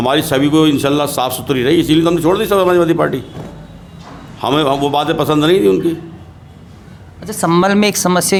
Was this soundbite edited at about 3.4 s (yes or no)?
no